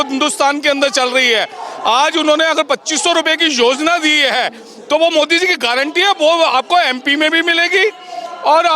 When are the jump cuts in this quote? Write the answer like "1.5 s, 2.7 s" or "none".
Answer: none